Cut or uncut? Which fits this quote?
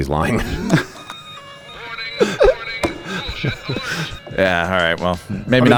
uncut